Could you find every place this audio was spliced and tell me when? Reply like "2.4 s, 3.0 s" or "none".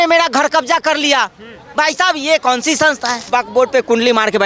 3.3 s